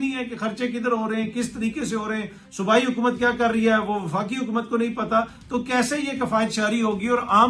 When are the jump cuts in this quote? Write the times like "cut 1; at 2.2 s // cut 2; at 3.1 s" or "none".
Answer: none